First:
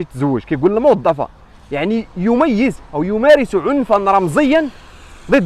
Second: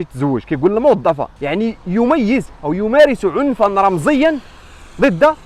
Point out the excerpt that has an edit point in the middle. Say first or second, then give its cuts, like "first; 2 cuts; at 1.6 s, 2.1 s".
second; 1 cut; at 1.3 s